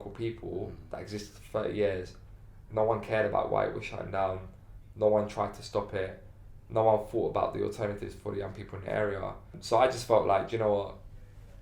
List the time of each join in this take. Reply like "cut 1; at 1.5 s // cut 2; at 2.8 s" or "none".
cut 1; at 9.6 s